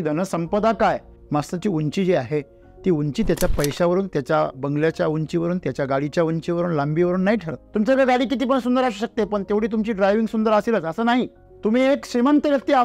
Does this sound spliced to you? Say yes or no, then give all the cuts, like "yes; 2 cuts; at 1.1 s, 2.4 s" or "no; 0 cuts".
yes; 3 cuts; at 1.1 s, 7.6 s, 11.4 s